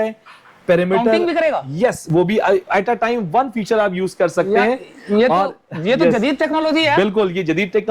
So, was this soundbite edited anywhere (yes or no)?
no